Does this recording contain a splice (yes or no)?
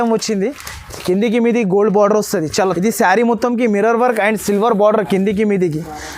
yes